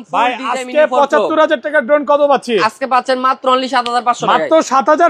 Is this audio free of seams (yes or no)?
yes